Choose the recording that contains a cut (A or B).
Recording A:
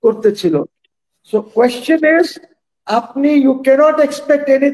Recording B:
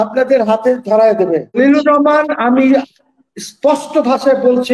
B